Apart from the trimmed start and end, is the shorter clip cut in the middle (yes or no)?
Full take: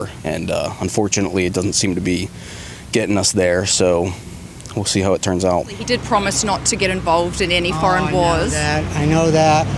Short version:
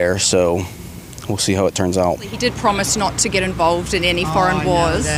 no